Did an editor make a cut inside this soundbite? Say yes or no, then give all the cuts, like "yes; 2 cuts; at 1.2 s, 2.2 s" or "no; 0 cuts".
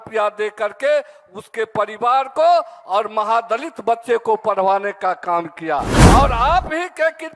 yes; 1 cut; at 6.0 s